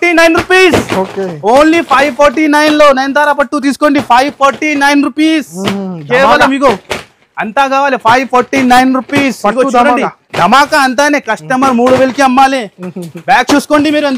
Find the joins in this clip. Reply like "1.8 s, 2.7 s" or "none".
none